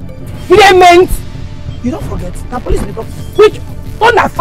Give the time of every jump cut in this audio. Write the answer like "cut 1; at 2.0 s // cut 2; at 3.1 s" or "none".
none